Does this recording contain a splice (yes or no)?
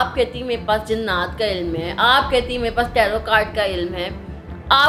no